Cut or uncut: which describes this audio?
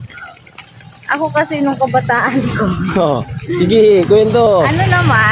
uncut